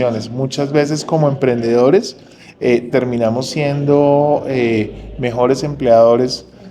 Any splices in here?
no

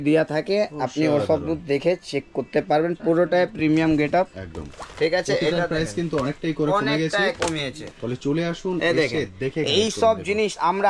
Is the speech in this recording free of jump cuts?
yes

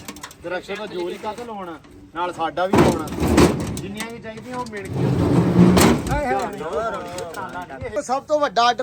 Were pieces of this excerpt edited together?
yes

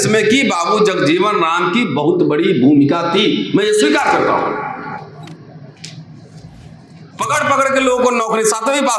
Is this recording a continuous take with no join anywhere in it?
yes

